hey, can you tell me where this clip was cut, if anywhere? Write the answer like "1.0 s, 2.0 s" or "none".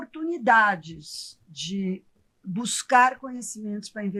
none